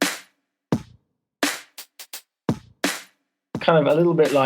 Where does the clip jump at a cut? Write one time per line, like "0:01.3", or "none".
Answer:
0:03.5